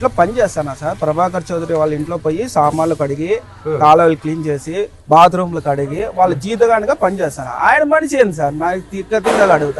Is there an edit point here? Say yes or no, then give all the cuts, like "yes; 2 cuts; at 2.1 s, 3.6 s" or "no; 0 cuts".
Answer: no; 0 cuts